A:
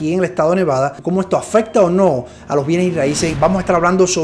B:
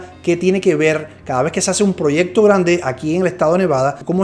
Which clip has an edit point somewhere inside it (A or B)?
A